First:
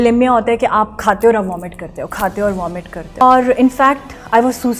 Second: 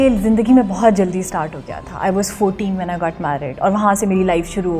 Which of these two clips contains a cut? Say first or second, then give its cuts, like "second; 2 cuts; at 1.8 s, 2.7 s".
first; 1 cut; at 3.2 s